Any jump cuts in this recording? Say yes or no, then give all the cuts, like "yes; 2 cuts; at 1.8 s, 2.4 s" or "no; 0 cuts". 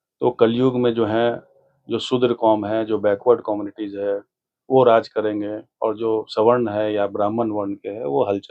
no; 0 cuts